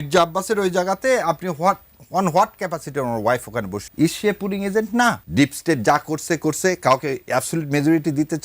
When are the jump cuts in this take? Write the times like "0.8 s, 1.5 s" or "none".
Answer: 3.8 s, 5.2 s